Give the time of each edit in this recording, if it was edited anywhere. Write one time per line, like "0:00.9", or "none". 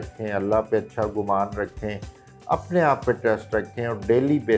none

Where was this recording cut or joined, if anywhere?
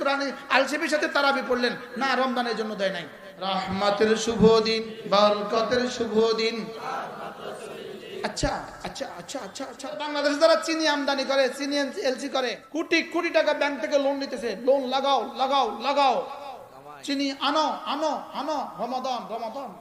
0:03.6
0:04.9
0:10.1
0:12.6

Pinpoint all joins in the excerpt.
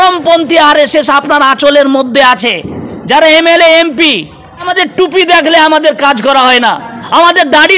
0:04.7

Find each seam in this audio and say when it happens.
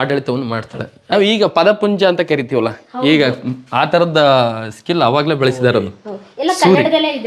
0:01.1

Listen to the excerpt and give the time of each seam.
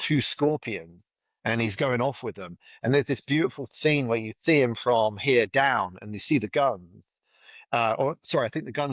none

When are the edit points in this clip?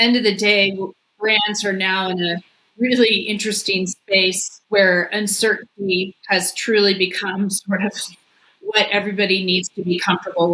0:04.5
0:06.2

